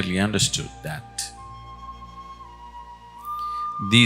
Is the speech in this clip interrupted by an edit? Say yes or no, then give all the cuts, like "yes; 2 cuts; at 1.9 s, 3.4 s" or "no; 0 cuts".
no; 0 cuts